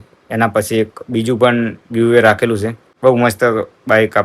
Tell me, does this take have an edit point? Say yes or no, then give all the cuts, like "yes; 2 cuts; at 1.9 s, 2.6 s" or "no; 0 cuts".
yes; 1 cut; at 2.8 s